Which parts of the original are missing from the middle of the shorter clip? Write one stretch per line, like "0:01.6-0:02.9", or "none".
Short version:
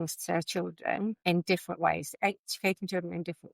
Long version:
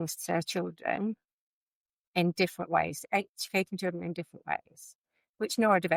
0:01.2-0:02.1